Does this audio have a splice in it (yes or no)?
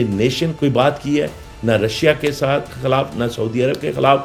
no